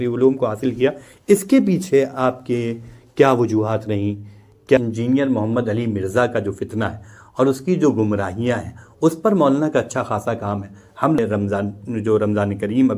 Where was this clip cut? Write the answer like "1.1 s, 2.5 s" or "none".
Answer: 4.8 s, 11.2 s